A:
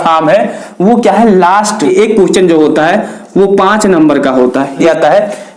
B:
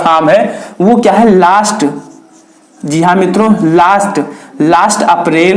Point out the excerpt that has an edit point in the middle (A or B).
A